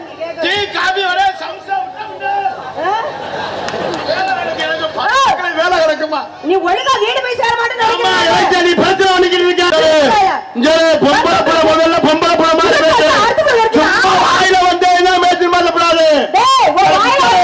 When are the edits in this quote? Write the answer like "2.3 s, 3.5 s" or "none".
9.7 s